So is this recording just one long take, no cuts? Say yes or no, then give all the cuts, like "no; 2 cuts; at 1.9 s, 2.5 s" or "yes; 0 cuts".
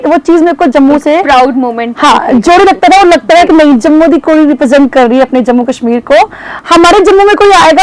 no; 1 cut; at 6.5 s